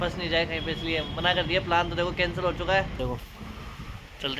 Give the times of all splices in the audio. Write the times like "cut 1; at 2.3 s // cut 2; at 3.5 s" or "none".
cut 1; at 2.9 s